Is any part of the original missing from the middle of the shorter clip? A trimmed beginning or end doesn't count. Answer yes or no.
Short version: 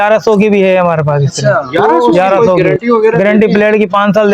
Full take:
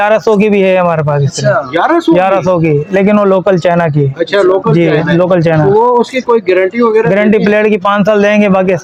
yes